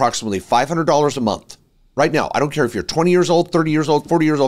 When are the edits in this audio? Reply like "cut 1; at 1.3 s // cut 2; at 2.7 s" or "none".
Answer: none

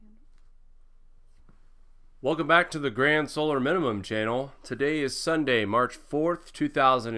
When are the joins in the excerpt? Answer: none

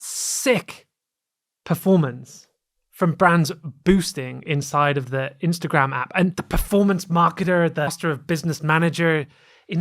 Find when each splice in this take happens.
cut 1; at 6.4 s // cut 2; at 7.9 s

